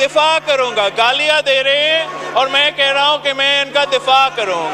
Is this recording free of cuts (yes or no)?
yes